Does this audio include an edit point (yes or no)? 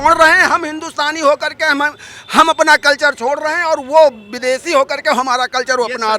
no